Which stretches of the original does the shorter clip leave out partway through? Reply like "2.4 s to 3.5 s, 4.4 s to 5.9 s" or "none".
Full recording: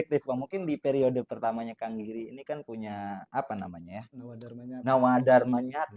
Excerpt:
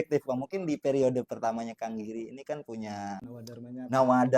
3.2 s to 4.2 s